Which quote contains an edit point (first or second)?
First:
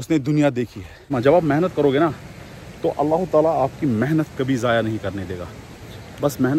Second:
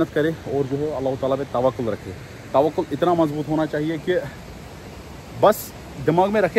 first